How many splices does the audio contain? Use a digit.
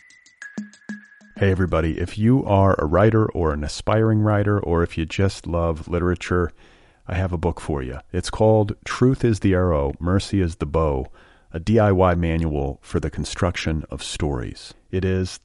1